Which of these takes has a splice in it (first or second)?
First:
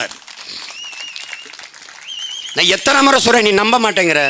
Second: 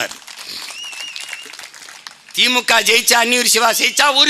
second